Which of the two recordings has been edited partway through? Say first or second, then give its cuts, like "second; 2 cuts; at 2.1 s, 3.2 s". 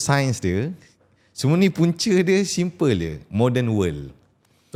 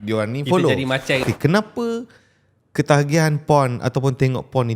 second; 1 cut; at 1.3 s